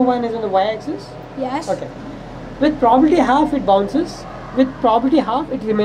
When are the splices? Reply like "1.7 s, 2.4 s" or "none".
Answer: none